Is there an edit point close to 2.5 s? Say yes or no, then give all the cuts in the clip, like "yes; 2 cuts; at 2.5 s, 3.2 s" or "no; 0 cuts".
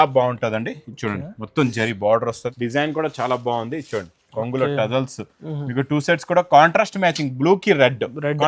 yes; 1 cut; at 2.5 s